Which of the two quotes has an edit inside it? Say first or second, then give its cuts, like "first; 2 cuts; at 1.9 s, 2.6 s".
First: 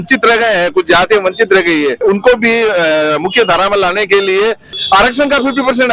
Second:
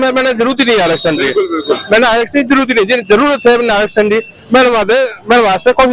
first; 2 cuts; at 2.0 s, 4.7 s